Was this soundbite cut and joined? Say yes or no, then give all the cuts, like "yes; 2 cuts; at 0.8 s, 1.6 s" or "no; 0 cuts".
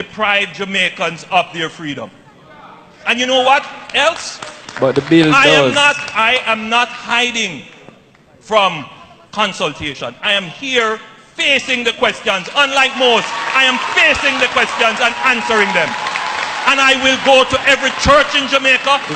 no; 0 cuts